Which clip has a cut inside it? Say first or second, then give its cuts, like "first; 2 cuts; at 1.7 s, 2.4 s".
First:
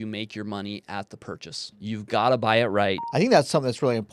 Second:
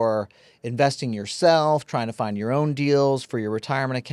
first; 2 cuts; at 1.8 s, 3.0 s